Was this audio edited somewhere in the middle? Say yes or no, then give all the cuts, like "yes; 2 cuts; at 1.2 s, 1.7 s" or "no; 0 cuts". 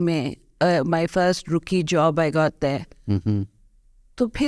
no; 0 cuts